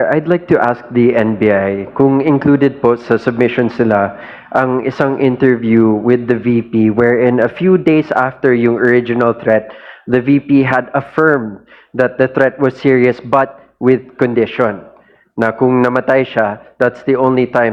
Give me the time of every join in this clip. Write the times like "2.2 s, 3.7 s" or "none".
none